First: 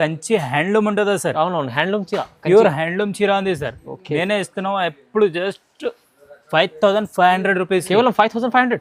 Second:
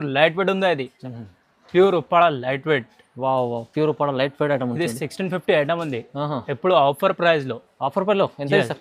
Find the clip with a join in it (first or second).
second